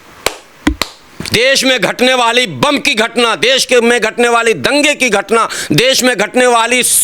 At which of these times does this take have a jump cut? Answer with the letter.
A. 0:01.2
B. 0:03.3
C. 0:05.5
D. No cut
A